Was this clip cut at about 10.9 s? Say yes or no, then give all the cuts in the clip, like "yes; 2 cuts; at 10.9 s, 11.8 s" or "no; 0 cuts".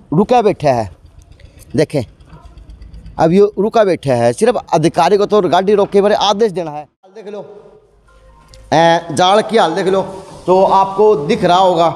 no; 1 cut; at 6.6 s